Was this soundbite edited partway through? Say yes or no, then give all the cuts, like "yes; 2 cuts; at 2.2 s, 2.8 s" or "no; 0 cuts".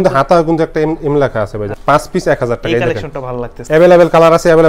yes; 2 cuts; at 1.7 s, 3.6 s